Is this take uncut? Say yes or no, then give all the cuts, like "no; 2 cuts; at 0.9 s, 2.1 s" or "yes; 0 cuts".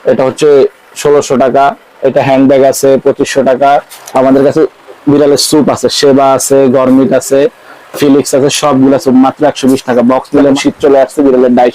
no; 2 cuts; at 4.0 s, 10.6 s